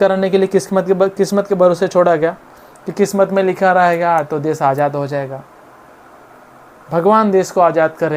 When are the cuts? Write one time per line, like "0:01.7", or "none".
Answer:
none